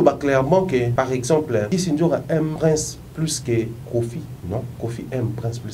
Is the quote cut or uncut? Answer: cut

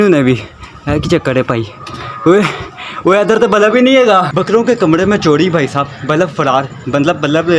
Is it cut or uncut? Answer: cut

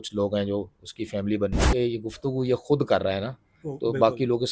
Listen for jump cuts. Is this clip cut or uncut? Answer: cut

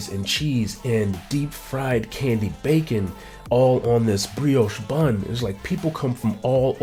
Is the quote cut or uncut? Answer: uncut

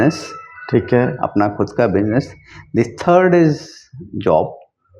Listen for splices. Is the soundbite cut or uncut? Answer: uncut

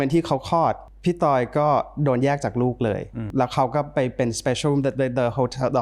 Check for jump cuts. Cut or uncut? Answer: cut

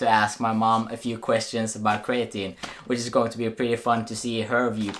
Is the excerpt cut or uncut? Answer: uncut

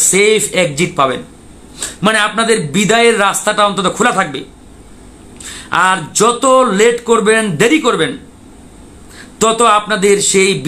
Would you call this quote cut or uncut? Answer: uncut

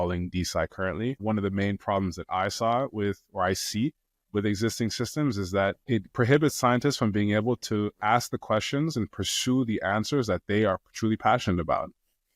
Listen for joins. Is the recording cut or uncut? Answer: cut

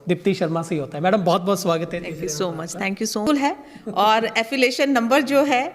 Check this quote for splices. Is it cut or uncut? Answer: cut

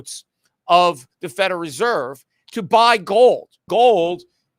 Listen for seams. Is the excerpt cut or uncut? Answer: cut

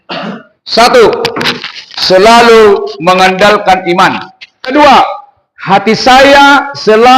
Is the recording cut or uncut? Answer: cut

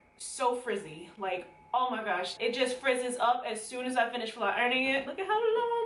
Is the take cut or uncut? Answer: cut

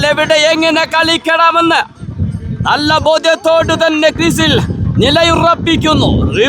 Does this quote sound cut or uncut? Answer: uncut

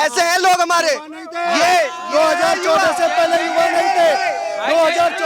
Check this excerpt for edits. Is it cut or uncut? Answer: uncut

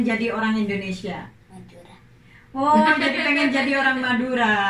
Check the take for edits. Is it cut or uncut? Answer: uncut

